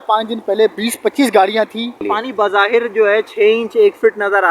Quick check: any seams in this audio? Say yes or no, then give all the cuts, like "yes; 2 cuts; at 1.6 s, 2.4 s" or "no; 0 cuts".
yes; 1 cut; at 2.0 s